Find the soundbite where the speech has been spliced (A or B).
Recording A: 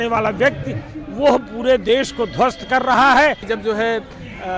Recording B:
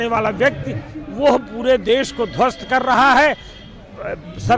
A